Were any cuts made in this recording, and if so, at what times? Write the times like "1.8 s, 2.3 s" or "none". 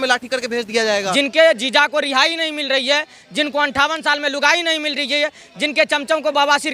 1.1 s